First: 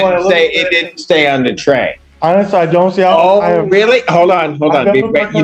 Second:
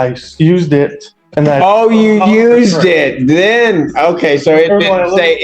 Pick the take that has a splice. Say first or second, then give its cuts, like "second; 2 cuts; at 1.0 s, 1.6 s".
first; 1 cut; at 2.0 s